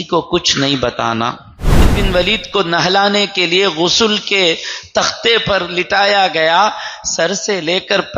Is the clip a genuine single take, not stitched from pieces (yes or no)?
no